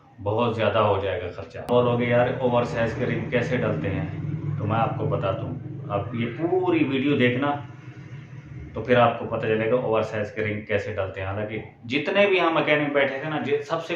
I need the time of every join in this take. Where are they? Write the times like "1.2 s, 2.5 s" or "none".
1.7 s